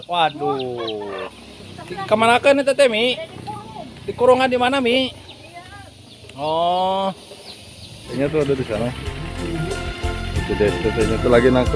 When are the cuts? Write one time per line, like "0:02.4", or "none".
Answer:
0:08.2